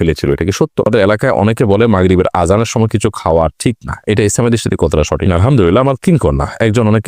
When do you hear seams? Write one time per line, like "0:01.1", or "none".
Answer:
0:00.9
0:05.3